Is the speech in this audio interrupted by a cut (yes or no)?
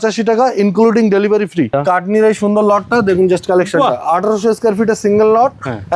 yes